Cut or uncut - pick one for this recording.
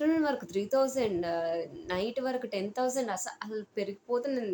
uncut